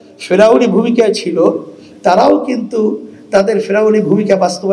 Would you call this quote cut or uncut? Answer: uncut